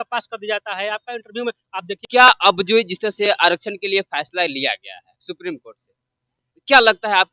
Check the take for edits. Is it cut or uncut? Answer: cut